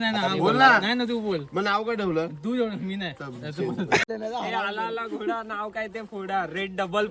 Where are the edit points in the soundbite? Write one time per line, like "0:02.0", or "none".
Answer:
0:04.0

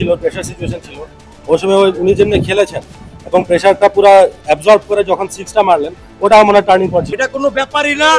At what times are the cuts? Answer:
0:07.0

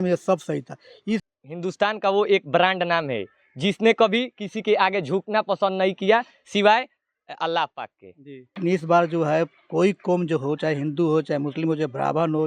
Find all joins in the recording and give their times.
0:01.2
0:08.6

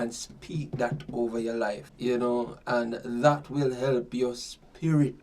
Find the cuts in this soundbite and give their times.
0:01.9

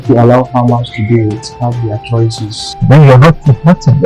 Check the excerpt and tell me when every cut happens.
0:02.6

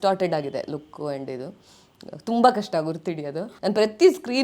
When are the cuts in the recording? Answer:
0:03.5

